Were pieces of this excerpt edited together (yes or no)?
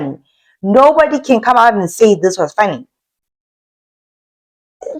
no